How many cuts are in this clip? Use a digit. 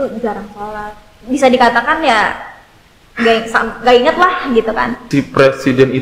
1